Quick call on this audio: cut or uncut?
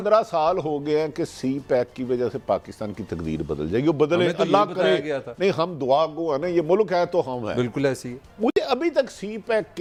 uncut